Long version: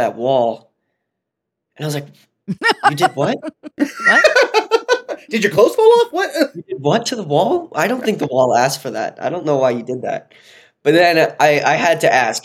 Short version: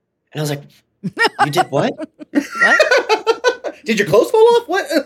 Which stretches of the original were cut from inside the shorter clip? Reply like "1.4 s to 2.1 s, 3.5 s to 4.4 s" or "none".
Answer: none